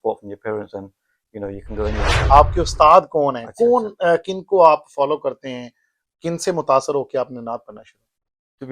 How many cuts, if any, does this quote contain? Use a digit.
1